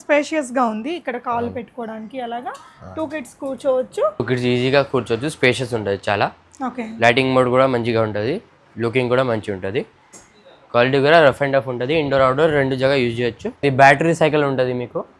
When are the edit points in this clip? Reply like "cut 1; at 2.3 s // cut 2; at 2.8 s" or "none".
cut 1; at 4.2 s // cut 2; at 13.5 s